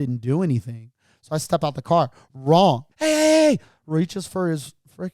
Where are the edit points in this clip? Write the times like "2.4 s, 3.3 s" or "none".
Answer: 2.9 s